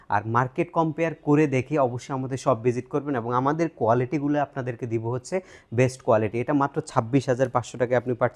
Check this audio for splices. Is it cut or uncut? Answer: uncut